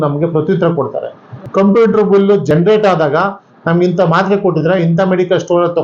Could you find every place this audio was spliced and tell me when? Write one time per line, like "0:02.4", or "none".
0:01.3
0:02.5